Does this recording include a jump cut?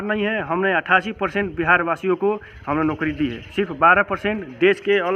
no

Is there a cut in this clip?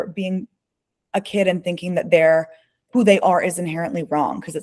no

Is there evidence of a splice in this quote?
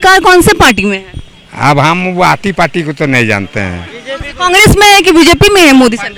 no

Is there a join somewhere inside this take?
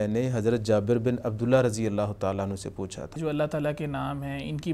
yes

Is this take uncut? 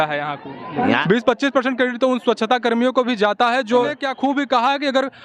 no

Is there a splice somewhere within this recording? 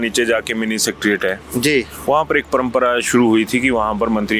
no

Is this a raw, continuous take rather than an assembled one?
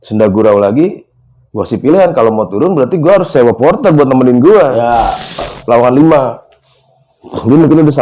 no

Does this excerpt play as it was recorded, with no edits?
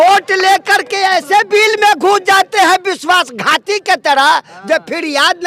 yes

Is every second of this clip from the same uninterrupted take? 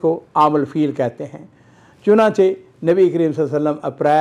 yes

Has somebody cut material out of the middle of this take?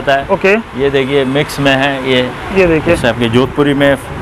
no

